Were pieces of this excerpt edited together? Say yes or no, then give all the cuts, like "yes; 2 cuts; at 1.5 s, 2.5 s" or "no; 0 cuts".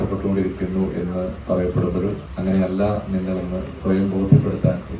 yes; 3 cuts; at 1.4 s, 2.3 s, 3.7 s